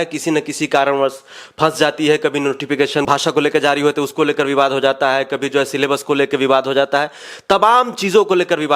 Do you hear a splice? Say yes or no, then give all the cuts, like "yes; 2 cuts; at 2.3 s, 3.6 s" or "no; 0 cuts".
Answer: yes; 1 cut; at 3.1 s